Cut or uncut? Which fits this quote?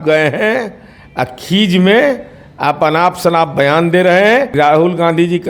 cut